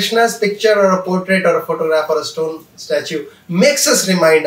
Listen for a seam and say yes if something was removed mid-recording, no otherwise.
no